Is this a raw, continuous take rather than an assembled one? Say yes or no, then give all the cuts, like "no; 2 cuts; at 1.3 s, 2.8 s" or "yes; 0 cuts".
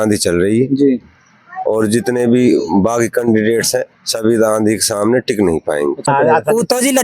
no; 1 cut; at 6.1 s